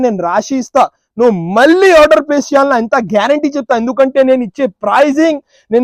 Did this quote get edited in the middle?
no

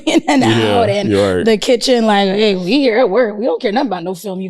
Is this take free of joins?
yes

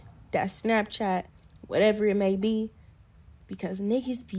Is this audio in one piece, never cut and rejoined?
no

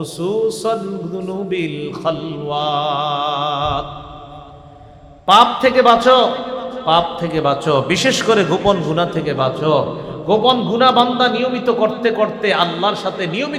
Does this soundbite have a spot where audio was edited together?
no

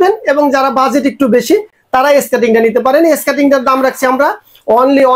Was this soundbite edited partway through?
no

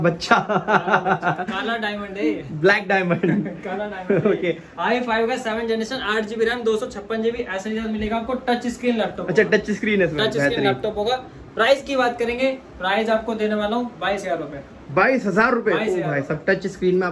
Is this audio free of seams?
yes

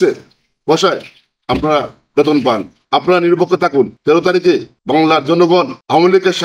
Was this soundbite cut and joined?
yes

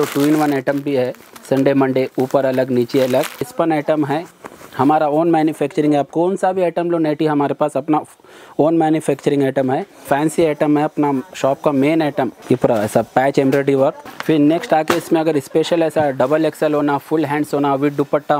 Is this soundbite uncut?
no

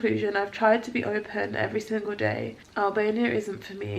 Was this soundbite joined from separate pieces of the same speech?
yes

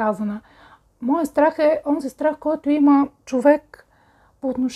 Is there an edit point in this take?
no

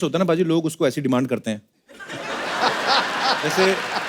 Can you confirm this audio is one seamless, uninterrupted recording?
yes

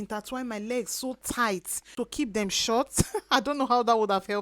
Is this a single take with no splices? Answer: no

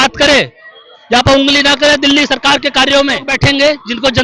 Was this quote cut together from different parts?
yes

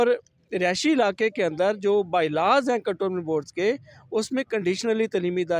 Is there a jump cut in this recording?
no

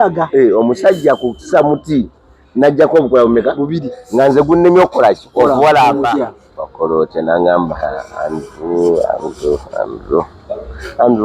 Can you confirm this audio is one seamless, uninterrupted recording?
no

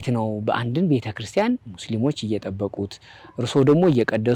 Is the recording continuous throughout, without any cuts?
yes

